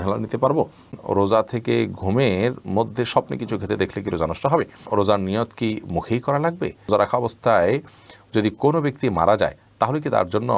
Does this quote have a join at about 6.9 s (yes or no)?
yes